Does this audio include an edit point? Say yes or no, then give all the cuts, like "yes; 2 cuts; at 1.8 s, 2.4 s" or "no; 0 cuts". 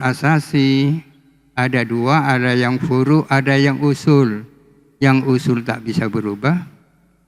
no; 0 cuts